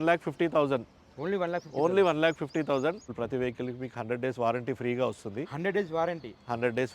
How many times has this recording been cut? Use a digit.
1